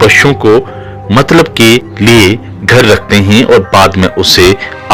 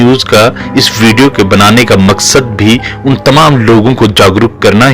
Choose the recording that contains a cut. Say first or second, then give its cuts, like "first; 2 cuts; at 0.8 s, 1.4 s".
first; 1 cut; at 1.9 s